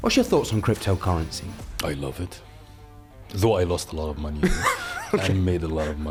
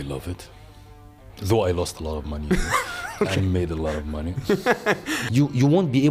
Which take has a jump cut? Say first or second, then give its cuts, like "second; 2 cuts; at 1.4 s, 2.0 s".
second; 1 cut; at 5.2 s